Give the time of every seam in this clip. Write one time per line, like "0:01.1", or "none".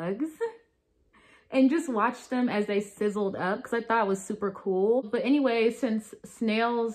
0:05.0